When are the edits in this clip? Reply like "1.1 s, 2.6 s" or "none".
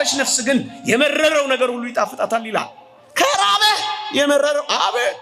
none